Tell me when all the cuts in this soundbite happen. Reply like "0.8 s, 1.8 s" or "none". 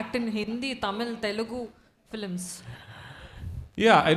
none